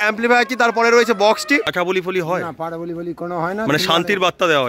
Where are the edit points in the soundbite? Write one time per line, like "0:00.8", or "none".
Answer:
0:01.7

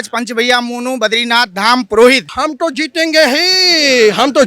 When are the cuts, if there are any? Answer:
0:02.3

